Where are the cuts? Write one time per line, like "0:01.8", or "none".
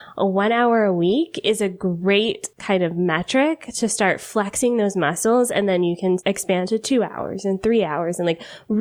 0:02.5
0:06.2